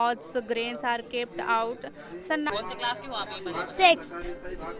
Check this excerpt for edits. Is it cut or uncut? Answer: cut